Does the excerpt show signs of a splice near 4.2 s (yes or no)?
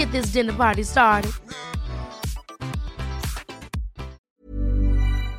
yes